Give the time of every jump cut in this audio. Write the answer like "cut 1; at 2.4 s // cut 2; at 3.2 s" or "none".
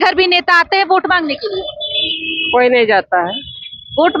none